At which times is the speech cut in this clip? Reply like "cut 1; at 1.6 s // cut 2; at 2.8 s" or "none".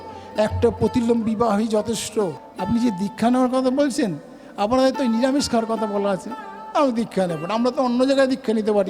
cut 1; at 2.5 s